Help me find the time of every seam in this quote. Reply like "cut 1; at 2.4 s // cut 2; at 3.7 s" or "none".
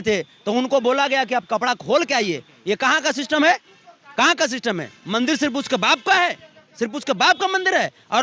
none